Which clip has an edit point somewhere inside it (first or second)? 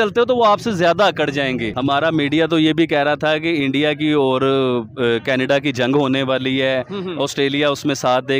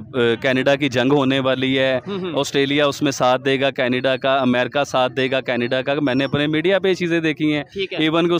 first